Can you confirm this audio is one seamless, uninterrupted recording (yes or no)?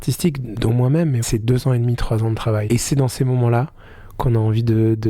no